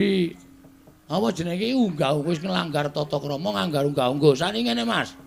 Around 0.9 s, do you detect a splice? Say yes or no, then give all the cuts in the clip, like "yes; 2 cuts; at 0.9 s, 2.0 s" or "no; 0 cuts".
no; 0 cuts